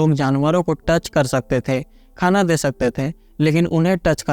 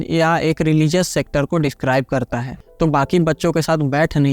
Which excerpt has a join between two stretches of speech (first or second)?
second